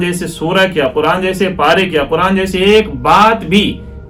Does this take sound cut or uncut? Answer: uncut